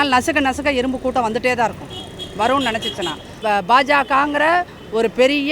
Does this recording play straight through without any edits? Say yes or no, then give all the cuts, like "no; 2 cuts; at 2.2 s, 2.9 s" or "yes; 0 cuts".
no; 1 cut; at 3.3 s